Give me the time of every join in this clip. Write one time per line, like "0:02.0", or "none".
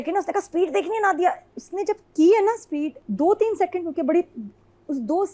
0:03.0